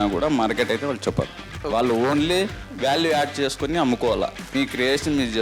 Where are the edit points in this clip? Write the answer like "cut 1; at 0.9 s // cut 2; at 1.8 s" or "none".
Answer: cut 1; at 1.5 s // cut 2; at 4.4 s

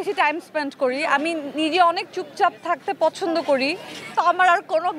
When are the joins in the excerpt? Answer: cut 1; at 4.1 s

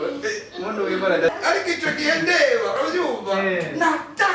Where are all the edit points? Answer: cut 1; at 1.3 s

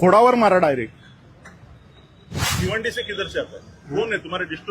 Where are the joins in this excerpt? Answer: cut 1; at 2.6 s

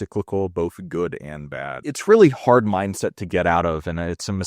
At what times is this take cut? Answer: cut 1; at 1.9 s

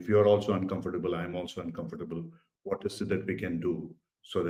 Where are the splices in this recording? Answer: none

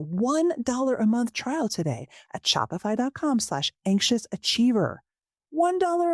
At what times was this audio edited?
none

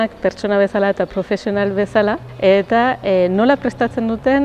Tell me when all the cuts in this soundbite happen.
cut 1; at 2.3 s

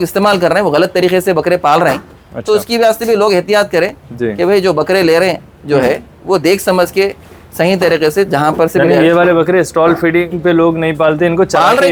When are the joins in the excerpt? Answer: none

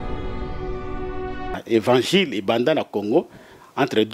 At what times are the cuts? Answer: cut 1; at 1.6 s

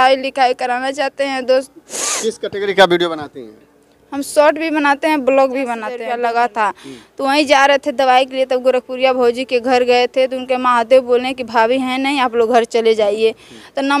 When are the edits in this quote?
cut 1; at 5.9 s

